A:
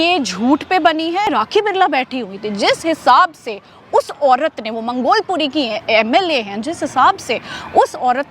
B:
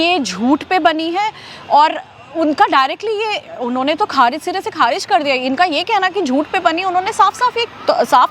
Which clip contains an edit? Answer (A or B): A